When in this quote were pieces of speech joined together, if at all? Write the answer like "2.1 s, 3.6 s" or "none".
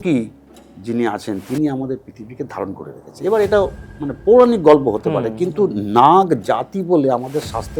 none